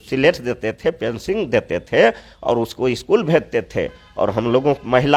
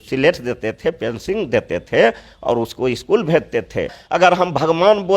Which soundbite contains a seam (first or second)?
second